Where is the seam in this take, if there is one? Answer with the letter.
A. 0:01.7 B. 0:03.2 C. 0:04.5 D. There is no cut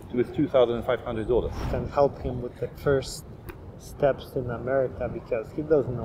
A